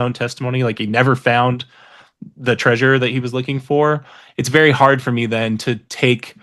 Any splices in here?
no; 0 cuts

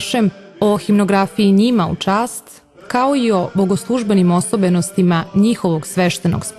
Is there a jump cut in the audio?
no; 0 cuts

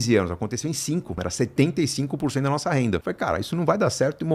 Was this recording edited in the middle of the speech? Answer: yes; 2 cuts; at 1.2 s, 3.1 s

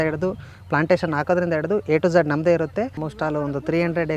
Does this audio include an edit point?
yes; 1 cut; at 3.0 s

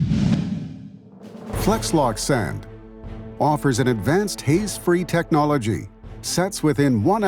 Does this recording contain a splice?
yes; 2 cuts; at 1.4 s, 2.8 s

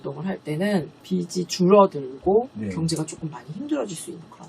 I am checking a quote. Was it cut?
yes; 1 cut; at 1.0 s

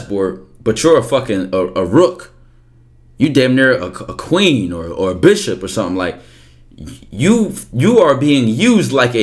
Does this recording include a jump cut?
no; 0 cuts

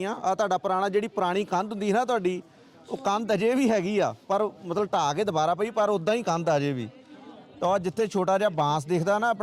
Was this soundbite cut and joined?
no; 0 cuts

